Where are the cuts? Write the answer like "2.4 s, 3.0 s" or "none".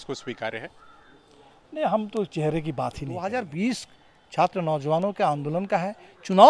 3.2 s

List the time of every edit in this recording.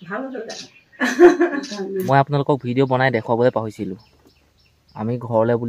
2.0 s

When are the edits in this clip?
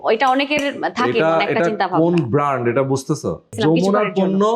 3.6 s

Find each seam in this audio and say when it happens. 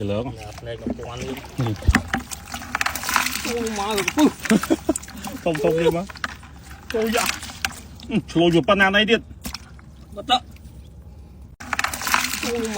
11.6 s

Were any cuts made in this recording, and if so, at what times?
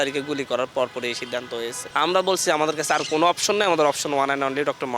1.8 s

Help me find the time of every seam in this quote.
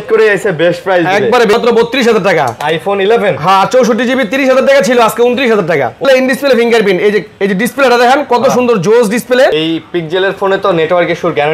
1.5 s, 6.0 s, 9.5 s

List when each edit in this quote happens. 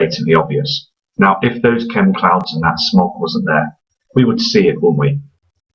3.0 s

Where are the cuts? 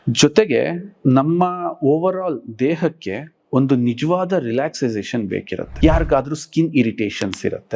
5.8 s

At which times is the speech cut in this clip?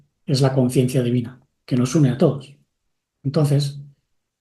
none

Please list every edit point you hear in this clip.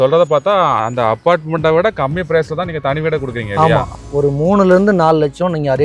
3.9 s

